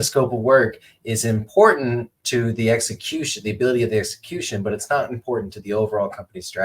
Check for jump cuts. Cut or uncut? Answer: uncut